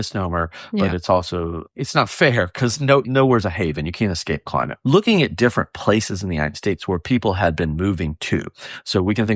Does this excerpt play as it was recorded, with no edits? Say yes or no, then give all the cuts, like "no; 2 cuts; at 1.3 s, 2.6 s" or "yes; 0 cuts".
no; 3 cuts; at 1.6 s, 3.1 s, 4.7 s